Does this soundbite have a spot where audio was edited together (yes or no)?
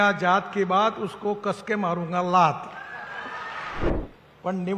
yes